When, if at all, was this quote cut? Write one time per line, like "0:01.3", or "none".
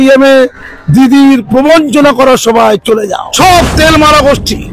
0:03.2